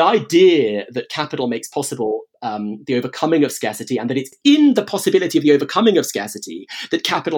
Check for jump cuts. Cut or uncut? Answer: cut